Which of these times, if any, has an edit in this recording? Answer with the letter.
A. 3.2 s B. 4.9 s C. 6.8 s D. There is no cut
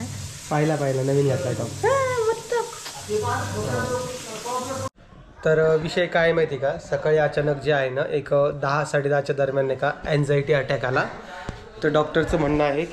B